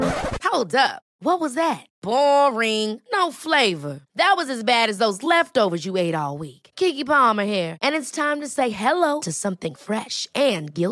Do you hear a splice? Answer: no; 0 cuts

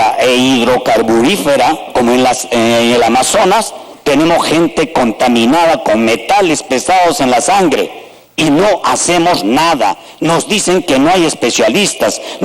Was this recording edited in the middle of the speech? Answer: no; 0 cuts

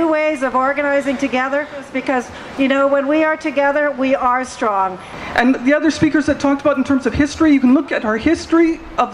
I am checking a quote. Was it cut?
yes; 2 cuts; at 1.9 s, 5.1 s

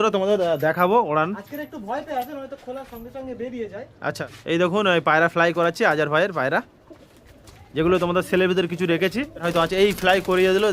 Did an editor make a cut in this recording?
yes; 2 cuts; at 4.2 s, 9.5 s

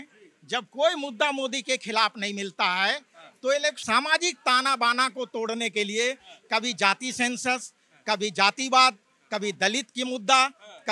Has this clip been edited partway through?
no; 0 cuts

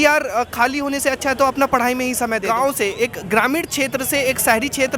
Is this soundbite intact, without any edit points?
no; 1 cut; at 2.4 s

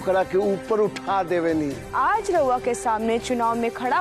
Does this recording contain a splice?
yes; 1 cut; at 1.8 s

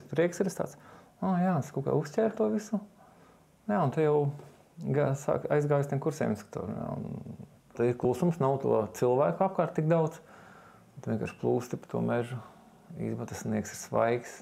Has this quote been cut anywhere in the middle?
yes; 1 cut; at 7.7 s

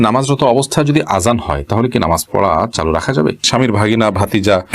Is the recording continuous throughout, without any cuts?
no; 1 cut; at 3.4 s

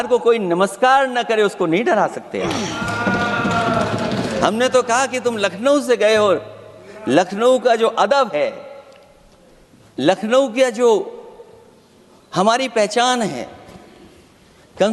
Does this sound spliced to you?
no; 0 cuts

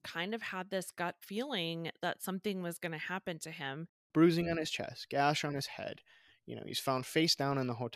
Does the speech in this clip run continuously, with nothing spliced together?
no; 1 cut; at 4.0 s

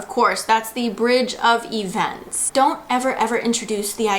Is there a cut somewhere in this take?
yes; 1 cut; at 2.4 s

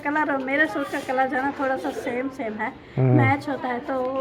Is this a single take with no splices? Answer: yes; 0 cuts

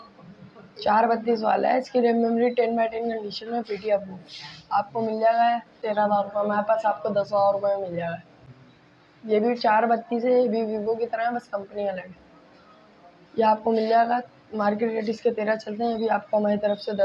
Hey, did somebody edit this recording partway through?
yes; 2 cuts; at 5.8 s, 8.2 s

